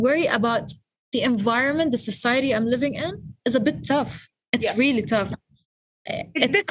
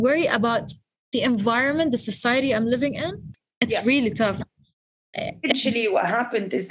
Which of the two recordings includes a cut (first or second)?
second